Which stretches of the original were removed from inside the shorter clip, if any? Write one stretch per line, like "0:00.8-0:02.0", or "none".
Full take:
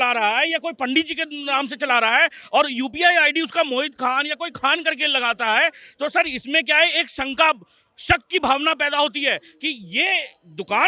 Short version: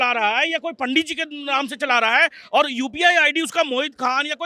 none